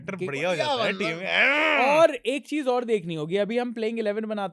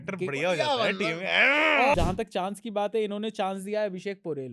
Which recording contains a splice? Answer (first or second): second